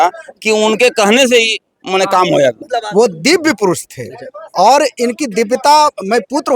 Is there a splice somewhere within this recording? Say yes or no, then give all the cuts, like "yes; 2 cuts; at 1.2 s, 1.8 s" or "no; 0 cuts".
yes; 1 cut; at 2.7 s